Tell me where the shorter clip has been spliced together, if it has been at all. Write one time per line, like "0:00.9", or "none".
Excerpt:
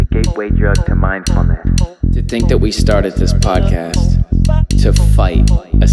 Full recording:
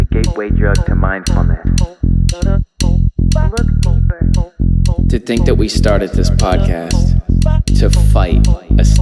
0:02.3

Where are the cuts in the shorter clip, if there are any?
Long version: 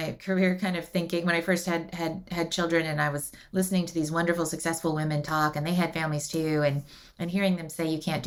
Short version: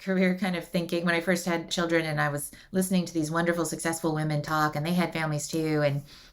0:01.7

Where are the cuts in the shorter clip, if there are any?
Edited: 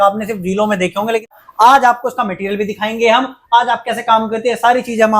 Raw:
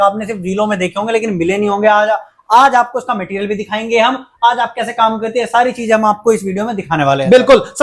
0:01.3

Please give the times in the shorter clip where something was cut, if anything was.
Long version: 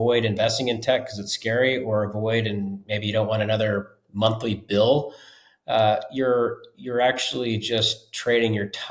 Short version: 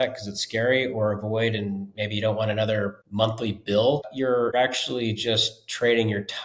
0:03.0
0:04.5

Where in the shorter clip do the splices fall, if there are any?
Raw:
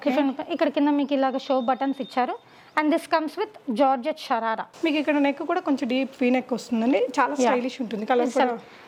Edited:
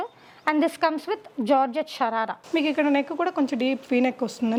none

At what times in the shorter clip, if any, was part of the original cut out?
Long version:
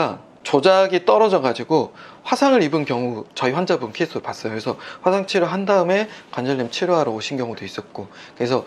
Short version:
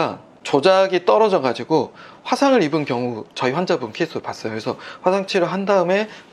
none

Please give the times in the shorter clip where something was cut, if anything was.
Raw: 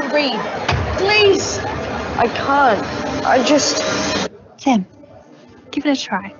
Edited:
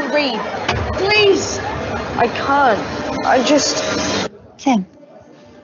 none

